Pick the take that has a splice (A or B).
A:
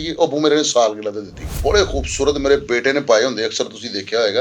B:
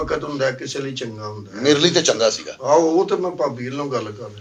A